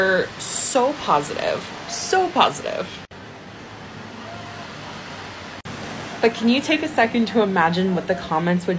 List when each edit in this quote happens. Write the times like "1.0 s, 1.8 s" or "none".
none